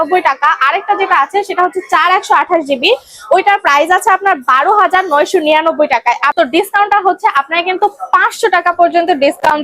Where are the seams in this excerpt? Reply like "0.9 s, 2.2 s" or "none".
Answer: 6.3 s